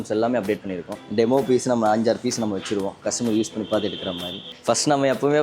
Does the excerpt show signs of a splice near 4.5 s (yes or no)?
yes